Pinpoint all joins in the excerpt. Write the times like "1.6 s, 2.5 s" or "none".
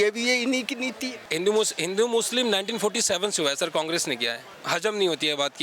1.1 s, 4.5 s

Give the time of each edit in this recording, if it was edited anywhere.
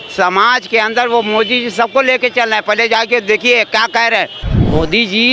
4.4 s

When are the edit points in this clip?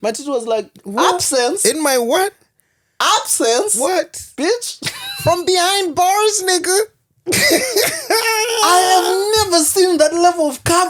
none

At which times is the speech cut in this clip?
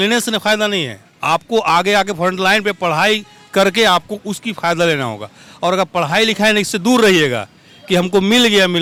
none

